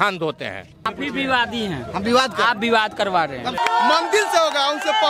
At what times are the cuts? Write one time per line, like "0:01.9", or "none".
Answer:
0:00.9
0:03.6